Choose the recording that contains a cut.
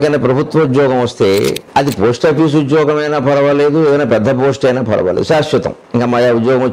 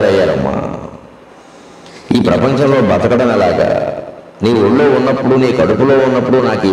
first; 2 cuts; at 1.6 s, 5.8 s

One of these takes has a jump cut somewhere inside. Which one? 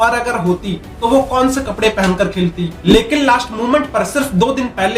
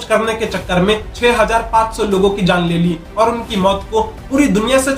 first; 1 cut; at 2.8 s

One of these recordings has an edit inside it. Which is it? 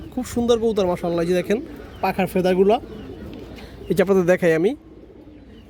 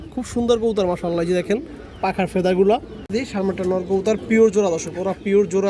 second; 1 cut; at 3.3 s

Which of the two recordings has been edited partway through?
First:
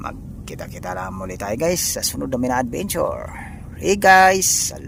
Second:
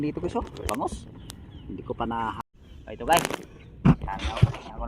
second; 1 cut; at 2.4 s

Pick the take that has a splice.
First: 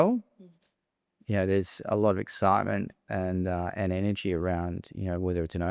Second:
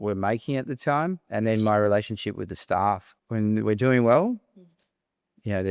second; 2 cuts; at 1.3 s, 3.1 s

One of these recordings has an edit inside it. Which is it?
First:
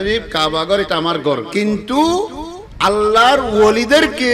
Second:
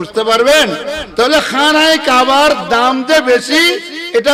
first; 1 cut; at 1.5 s

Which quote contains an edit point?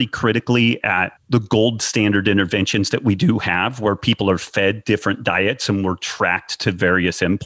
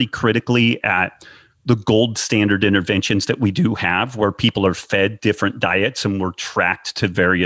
first; 1 cut; at 1.1 s

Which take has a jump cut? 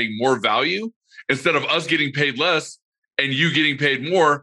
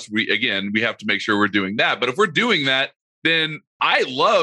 second; 1 cut; at 3.4 s

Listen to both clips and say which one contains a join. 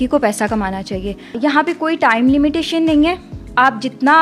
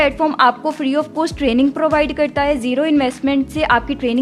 first; 1 cut; at 1.4 s

